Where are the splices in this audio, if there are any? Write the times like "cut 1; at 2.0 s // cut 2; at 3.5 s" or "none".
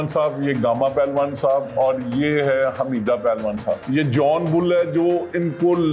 cut 1; at 3.8 s